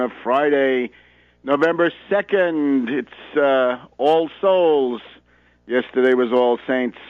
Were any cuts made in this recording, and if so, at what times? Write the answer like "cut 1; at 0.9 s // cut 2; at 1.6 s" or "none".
none

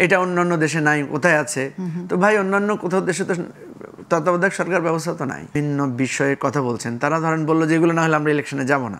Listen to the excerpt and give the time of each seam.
cut 1; at 5.5 s

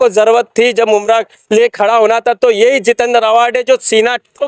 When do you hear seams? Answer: none

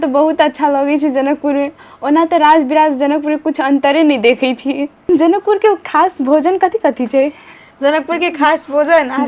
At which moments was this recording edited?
cut 1; at 4.9 s

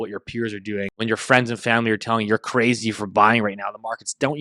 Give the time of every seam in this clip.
cut 1; at 1.0 s

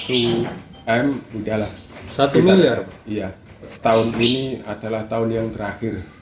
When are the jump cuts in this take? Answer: cut 1; at 3.7 s

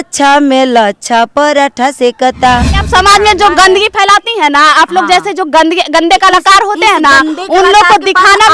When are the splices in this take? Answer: cut 1; at 2.8 s

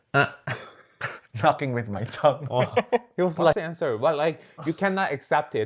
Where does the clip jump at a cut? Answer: cut 1; at 3.6 s

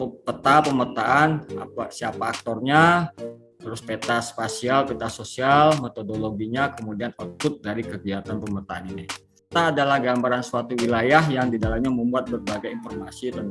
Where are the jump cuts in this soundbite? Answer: cut 1; at 9.4 s

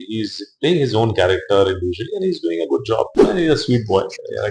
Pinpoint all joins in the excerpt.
cut 1; at 3.2 s

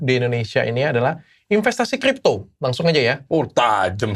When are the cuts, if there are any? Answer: none

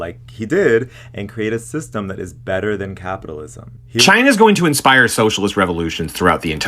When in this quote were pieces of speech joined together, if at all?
cut 1; at 4.0 s

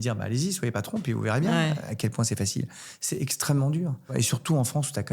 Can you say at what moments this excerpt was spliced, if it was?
cut 1; at 4.1 s

